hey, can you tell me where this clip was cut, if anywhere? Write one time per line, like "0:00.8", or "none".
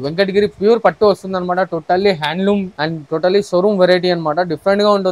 0:02.7